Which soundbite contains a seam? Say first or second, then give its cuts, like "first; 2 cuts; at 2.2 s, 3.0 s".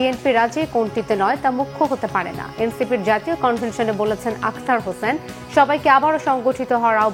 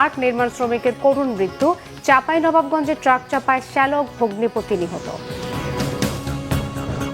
second; 1 cut; at 5.9 s